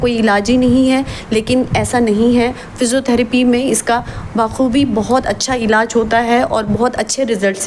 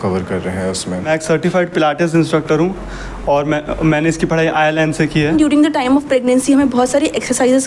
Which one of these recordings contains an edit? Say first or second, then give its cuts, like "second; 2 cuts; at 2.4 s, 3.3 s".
second; 2 cuts; at 1.1 s, 5.3 s